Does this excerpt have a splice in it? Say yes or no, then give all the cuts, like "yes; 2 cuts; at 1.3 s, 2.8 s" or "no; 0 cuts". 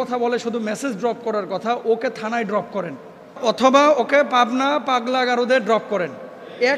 yes; 1 cut; at 3.4 s